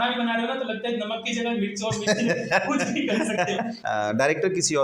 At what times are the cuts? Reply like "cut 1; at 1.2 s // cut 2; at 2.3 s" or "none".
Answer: cut 1; at 3.8 s

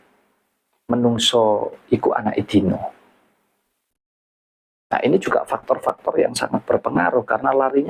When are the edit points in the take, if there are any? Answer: none

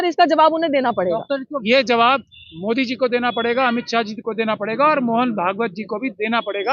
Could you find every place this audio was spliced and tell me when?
cut 1; at 1.5 s

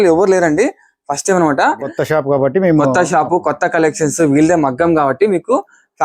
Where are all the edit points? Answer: cut 1; at 1.9 s

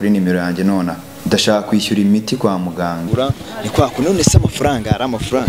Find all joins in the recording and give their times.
cut 1; at 1.1 s // cut 2; at 3.0 s

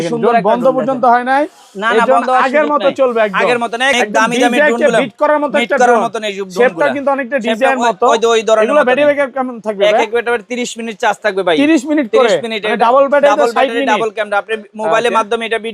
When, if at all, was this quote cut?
cut 1; at 3.9 s

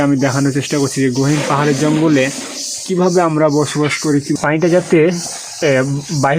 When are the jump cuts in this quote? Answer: cut 1; at 4.4 s

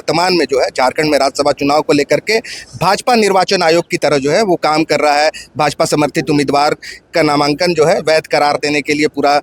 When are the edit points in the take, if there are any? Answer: none

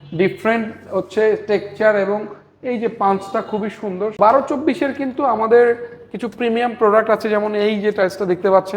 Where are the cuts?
cut 1; at 4.2 s

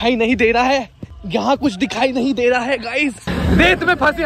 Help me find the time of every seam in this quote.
cut 1; at 3.2 s

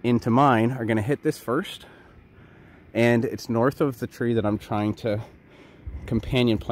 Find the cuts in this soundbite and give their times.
none

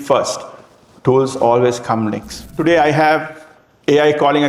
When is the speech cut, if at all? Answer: cut 1; at 2.4 s

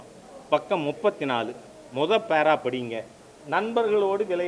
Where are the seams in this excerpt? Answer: none

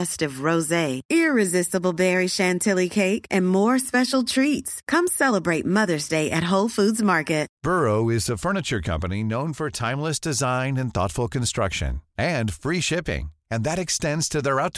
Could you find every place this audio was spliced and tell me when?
cut 1; at 7.5 s

